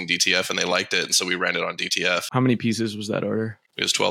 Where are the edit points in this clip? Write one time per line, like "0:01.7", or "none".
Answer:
0:02.3